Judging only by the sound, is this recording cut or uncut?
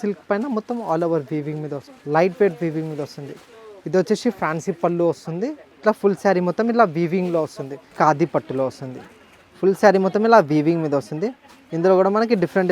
cut